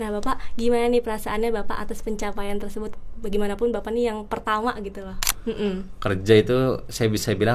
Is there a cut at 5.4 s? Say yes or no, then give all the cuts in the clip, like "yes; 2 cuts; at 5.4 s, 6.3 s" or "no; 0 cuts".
yes; 1 cut; at 5.4 s